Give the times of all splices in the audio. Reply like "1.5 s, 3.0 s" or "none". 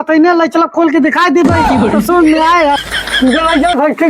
2.8 s